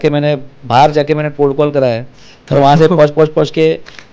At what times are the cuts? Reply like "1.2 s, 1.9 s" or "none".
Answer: none

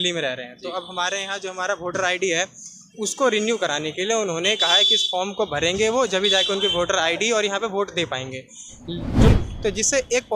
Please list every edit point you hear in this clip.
9.3 s

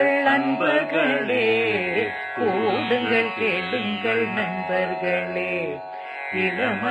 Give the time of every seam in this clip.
none

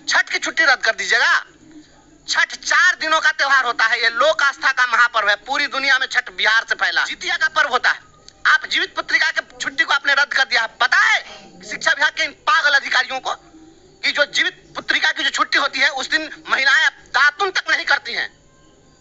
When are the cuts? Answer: 7.2 s

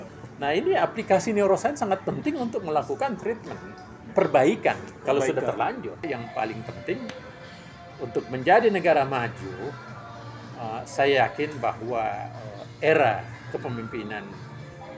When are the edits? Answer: 6.1 s

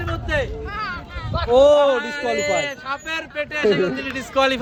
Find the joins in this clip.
none

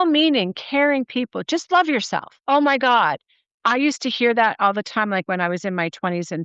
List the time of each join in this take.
2.3 s

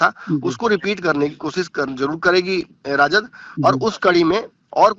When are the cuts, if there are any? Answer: none

